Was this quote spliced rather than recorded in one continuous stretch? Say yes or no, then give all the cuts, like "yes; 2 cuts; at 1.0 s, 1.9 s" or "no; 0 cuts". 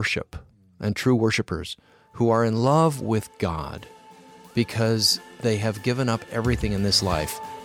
no; 0 cuts